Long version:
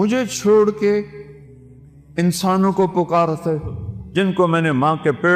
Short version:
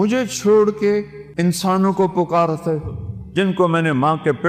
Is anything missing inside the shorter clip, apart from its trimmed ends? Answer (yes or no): yes